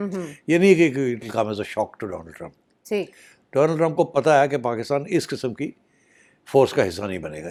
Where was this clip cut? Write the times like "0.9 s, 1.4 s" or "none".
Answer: none

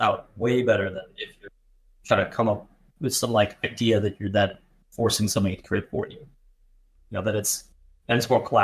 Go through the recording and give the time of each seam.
none

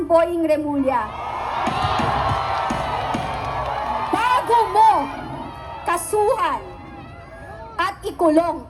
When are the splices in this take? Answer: none

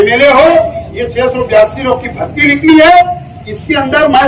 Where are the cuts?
none

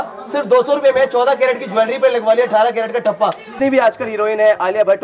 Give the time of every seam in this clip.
3.5 s

